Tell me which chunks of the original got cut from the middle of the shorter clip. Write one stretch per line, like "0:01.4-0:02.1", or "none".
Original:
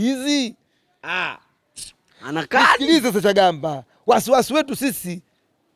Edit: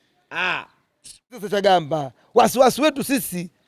0:02.2-0:03.2